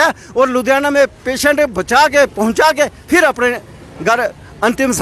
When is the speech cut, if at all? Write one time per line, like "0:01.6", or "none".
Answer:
none